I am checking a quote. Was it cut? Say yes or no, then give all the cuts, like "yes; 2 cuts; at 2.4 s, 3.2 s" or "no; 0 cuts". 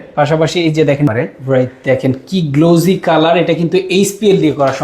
yes; 1 cut; at 1.1 s